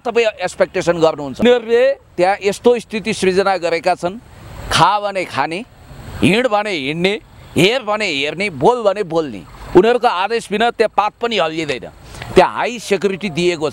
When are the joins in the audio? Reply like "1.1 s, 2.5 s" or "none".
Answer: 1.4 s